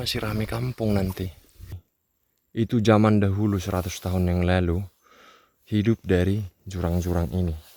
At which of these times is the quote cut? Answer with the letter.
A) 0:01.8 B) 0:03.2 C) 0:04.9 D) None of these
A